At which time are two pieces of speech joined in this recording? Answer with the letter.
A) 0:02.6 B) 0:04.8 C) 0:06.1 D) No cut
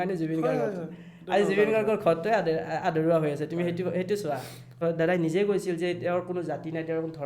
B